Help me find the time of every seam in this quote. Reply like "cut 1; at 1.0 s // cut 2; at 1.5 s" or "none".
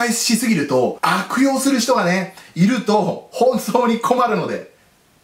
cut 1; at 1.0 s